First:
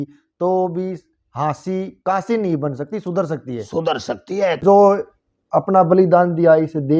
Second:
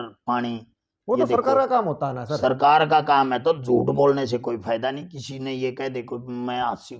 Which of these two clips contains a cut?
first; 1 cut; at 4.6 s

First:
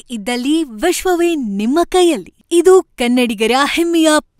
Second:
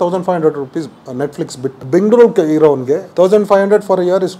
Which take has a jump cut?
second; 2 cuts; at 1.8 s, 3.1 s

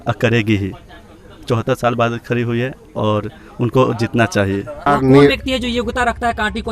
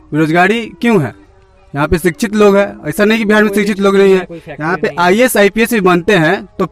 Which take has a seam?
first; 1 cut; at 4.9 s

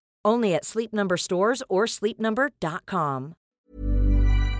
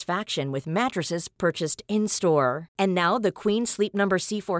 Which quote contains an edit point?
first; 1 cut; at 3.6 s

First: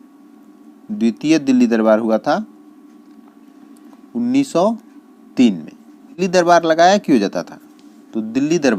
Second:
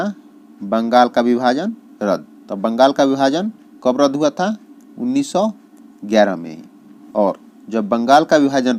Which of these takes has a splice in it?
first; 1 cut; at 6.2 s

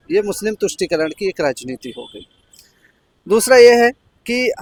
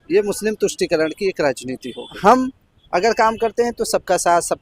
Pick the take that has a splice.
second; 1 cut; at 2.1 s

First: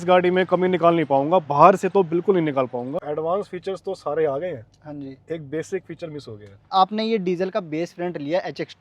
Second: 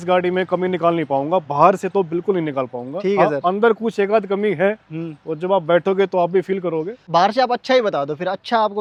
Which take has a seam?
first; 2 cuts; at 3.0 s, 6.7 s

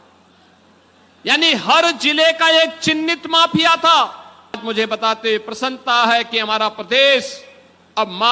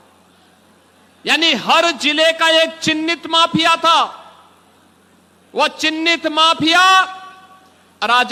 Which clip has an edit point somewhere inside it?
first; 1 cut; at 4.6 s

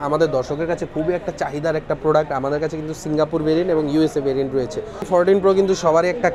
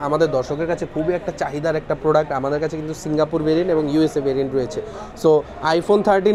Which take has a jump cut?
first; 1 cut; at 5.0 s

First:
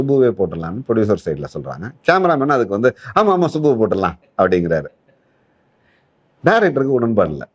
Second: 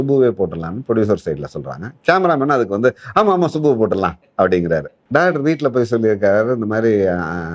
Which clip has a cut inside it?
second; 1 cut; at 5.0 s

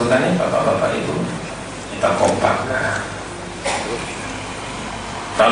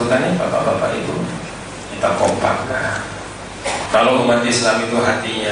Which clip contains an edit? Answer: second; 1 cut; at 3.8 s

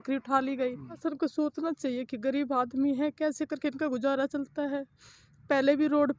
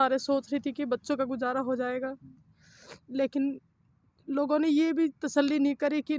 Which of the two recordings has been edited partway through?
first; 1 cut; at 1.0 s

